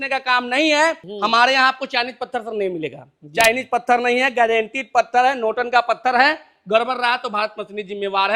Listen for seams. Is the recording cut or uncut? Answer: cut